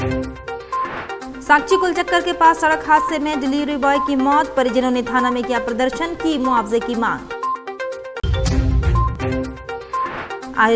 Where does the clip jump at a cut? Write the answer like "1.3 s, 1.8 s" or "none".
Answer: 1.2 s